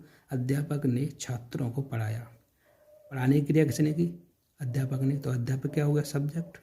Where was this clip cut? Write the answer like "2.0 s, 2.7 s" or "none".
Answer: 3.2 s